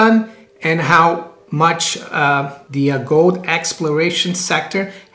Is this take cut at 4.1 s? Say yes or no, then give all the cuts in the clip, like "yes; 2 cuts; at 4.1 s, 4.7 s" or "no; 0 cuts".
no; 2 cuts; at 1.4 s, 2.6 s